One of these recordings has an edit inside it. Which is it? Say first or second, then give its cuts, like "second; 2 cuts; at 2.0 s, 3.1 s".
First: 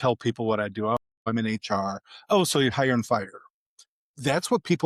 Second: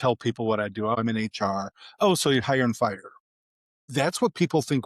second; 1 cut; at 1.0 s